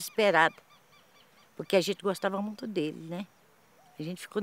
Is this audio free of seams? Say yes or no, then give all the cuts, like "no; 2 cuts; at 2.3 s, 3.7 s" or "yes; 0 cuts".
yes; 0 cuts